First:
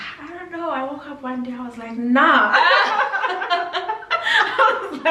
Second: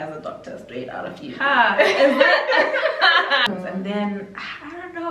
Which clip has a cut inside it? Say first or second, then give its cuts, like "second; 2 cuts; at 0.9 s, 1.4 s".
second; 1 cut; at 3.4 s